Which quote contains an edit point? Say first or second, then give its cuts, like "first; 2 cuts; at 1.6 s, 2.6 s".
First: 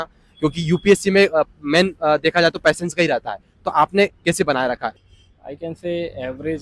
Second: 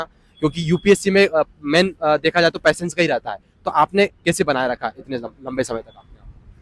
first; 1 cut; at 5.0 s